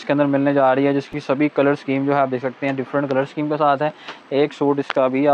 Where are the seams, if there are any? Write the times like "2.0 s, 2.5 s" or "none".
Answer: none